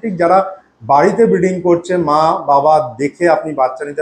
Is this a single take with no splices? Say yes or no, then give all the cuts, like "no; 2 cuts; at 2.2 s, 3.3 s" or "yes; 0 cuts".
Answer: yes; 0 cuts